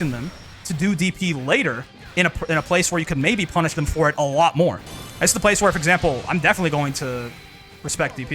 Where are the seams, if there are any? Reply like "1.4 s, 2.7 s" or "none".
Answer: 4.9 s

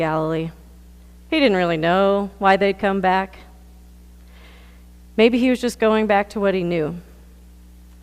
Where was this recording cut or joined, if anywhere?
1.8 s

